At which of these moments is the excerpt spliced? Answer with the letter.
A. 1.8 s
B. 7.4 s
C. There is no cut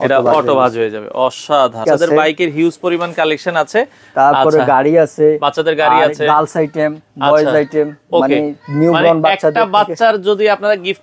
A